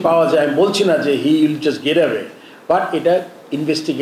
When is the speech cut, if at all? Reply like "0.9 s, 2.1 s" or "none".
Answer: none